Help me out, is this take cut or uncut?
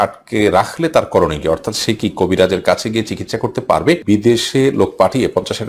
cut